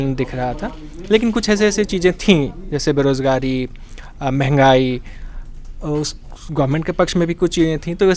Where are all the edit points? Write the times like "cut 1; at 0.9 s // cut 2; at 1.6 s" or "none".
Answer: none